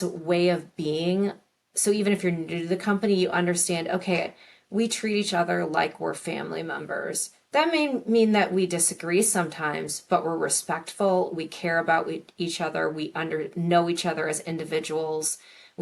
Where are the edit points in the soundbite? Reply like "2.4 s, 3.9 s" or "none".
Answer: none